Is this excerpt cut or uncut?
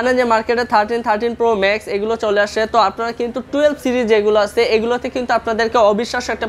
uncut